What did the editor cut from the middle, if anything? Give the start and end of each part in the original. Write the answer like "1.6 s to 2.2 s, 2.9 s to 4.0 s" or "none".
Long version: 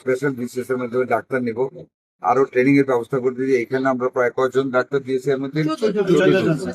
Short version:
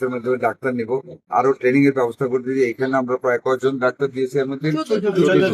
1.8 s to 2.1 s